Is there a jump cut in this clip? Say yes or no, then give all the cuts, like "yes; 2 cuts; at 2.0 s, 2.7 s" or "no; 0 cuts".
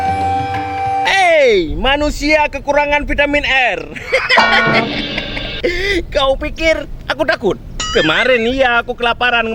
yes; 1 cut; at 1.0 s